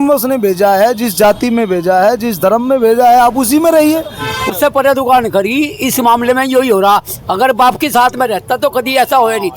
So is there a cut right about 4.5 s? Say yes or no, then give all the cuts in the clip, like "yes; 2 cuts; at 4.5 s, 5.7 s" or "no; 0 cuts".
yes; 1 cut; at 4.5 s